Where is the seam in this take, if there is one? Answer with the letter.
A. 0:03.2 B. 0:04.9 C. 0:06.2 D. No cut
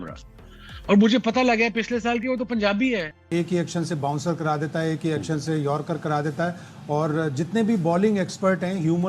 A